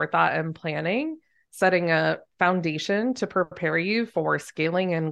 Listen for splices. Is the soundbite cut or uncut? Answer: uncut